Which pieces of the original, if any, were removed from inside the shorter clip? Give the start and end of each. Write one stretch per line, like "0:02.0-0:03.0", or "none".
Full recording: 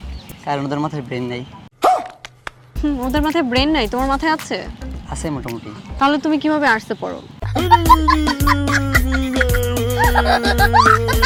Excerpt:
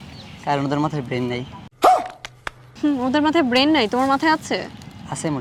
none